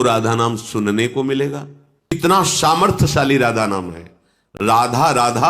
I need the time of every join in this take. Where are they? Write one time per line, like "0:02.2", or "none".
0:02.2